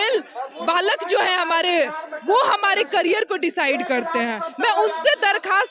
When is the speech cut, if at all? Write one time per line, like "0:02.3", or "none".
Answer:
none